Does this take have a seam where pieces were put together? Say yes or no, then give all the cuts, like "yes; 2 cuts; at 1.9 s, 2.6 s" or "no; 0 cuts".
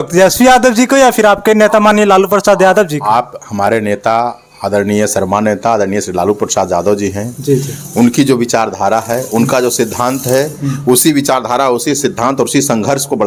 no; 0 cuts